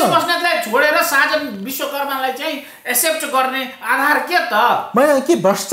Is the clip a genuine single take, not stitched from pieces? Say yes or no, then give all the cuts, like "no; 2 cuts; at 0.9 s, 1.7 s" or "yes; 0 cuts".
yes; 0 cuts